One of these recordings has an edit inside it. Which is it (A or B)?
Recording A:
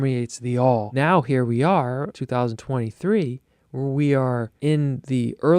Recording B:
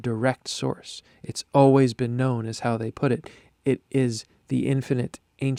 A